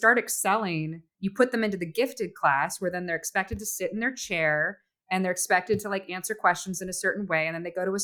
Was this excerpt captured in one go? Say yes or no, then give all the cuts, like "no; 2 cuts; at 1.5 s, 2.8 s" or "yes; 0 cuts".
no; 1 cut; at 1.1 s